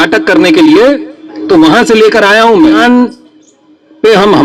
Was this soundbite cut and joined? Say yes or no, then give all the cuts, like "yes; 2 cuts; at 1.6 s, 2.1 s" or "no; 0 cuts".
yes; 1 cut; at 2.8 s